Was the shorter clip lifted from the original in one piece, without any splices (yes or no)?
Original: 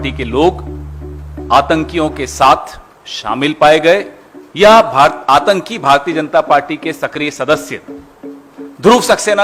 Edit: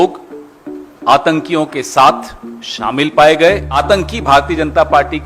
no